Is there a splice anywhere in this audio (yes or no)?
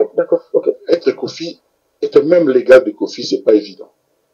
no